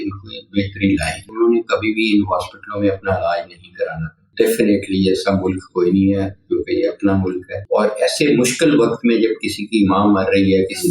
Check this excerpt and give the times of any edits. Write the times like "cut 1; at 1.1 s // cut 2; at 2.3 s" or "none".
cut 1; at 1.2 s // cut 2; at 4.2 s // cut 3; at 7.5 s